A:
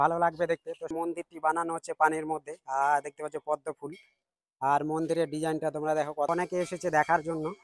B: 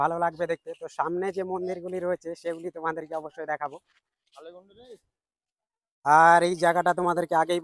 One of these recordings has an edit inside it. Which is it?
A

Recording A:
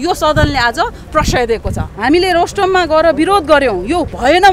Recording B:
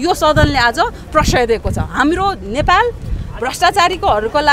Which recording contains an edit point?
A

